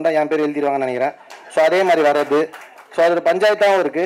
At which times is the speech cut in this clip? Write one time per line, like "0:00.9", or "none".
none